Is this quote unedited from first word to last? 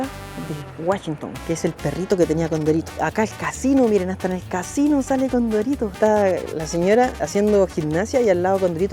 no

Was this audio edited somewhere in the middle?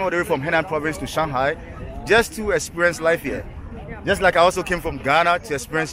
no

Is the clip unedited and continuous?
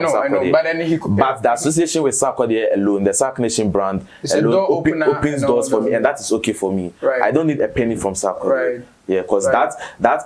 yes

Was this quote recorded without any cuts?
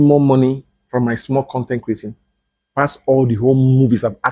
yes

